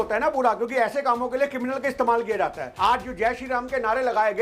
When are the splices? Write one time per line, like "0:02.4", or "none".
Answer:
0:02.7